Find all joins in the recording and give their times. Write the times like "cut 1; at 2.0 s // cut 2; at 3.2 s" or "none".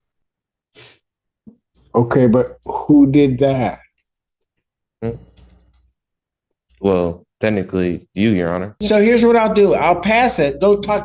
cut 1; at 8.8 s